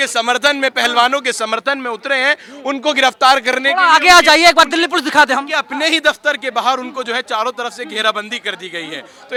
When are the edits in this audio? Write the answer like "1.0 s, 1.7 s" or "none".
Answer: none